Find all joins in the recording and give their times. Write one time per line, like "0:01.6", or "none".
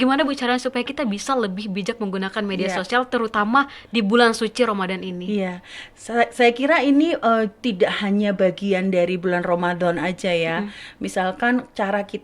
none